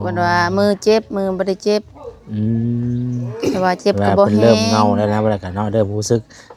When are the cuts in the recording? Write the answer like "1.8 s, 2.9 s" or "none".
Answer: none